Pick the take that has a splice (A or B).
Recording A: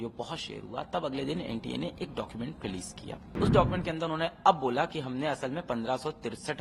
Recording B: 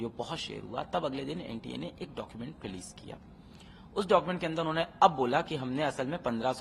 A